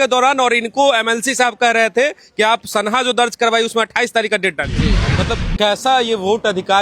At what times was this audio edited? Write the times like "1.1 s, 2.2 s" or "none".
5.0 s